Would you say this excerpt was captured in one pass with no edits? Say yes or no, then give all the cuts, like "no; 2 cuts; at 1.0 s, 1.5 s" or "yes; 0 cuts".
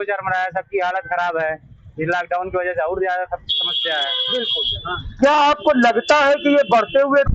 no; 1 cut; at 4.6 s